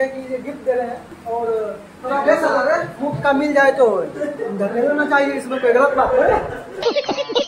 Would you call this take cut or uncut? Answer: cut